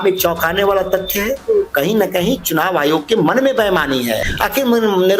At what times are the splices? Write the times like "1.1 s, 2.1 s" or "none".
4.2 s